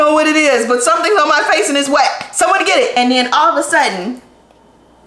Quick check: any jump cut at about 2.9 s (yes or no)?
yes